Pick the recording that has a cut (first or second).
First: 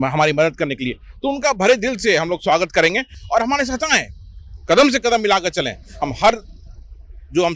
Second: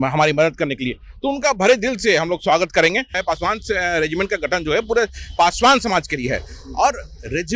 second